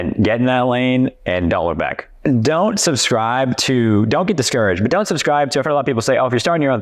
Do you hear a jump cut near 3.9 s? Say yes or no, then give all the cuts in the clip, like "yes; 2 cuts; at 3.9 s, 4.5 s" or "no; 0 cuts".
no; 1 cut; at 2.2 s